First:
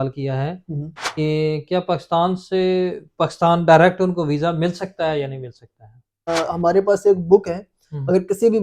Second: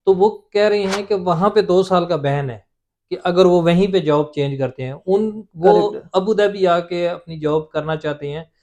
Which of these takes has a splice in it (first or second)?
first